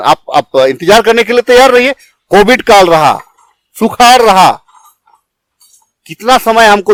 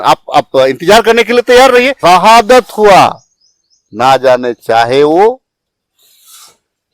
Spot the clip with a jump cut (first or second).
second